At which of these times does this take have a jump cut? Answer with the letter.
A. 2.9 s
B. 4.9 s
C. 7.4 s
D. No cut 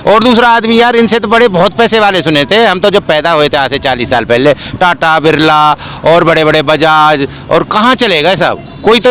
D